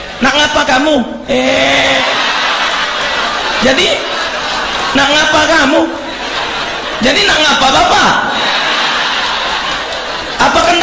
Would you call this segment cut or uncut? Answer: uncut